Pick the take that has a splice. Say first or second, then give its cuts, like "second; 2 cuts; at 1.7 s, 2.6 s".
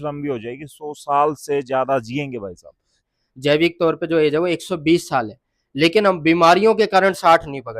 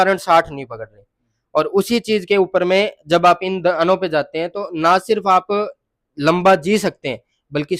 first; 1 cut; at 2.9 s